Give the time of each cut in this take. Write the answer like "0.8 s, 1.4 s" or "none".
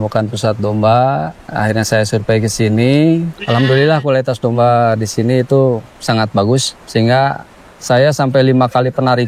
1.4 s, 3.4 s, 5.9 s, 6.8 s